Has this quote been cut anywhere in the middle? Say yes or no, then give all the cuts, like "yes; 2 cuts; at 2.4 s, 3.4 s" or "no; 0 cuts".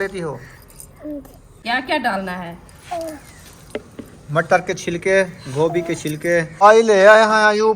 yes; 2 cuts; at 1.4 s, 6.6 s